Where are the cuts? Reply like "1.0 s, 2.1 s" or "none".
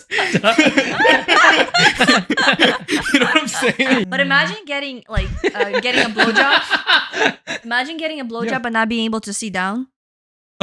4.0 s